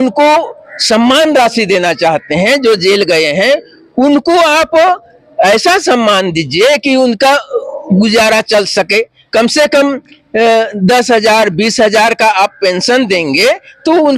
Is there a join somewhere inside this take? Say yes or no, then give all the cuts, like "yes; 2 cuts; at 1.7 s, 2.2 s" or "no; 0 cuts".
no; 0 cuts